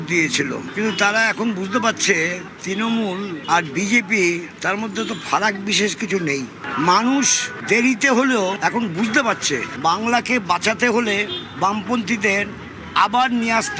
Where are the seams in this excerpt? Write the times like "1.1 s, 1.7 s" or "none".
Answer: none